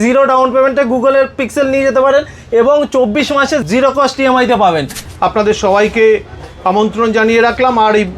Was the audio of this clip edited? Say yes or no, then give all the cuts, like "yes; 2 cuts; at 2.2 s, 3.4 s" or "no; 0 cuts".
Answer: yes; 2 cuts; at 3.6 s, 5.0 s